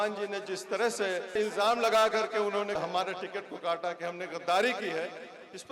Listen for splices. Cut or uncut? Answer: cut